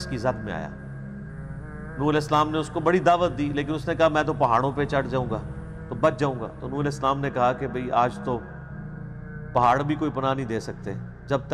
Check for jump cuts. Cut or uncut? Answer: uncut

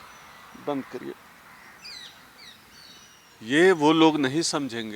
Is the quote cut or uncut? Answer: cut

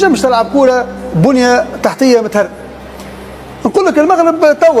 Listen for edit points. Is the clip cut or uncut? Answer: cut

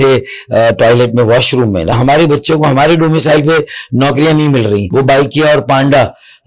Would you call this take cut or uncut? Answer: cut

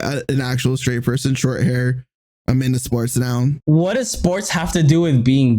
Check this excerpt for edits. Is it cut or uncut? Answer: cut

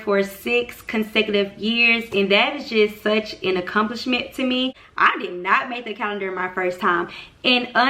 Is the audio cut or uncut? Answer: cut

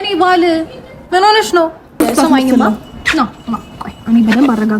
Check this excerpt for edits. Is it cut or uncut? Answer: cut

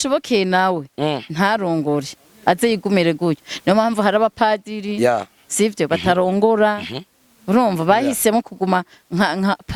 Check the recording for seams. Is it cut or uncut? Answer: uncut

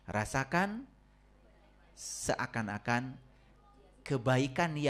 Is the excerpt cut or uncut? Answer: uncut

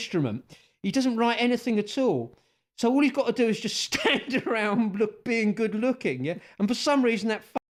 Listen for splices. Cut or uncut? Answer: uncut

